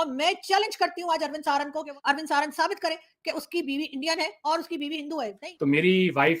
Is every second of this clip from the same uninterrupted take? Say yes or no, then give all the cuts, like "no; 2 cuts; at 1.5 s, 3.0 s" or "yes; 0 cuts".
no; 2 cuts; at 1.9 s, 5.4 s